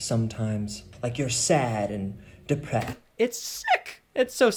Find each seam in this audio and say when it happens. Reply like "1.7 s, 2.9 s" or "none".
none